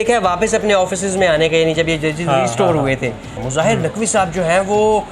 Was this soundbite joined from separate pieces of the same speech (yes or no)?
yes